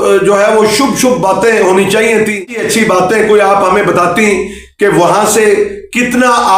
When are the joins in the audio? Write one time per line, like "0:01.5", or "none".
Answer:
0:02.5

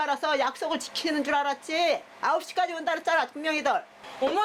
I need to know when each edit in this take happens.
none

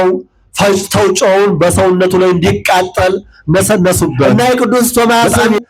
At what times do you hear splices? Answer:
0:04.3

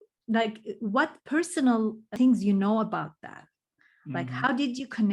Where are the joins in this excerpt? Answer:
0:02.1

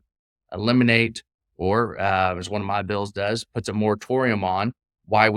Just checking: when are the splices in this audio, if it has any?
none

